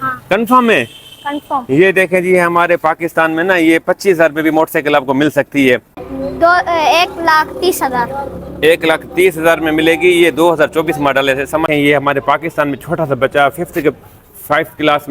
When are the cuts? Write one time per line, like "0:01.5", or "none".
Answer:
0:06.1
0:11.7